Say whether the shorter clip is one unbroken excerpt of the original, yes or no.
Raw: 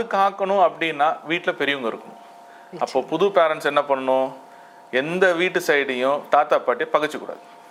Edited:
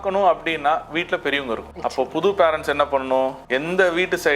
no